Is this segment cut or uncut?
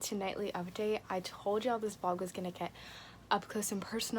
uncut